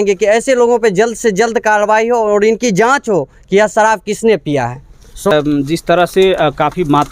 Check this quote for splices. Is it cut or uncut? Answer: uncut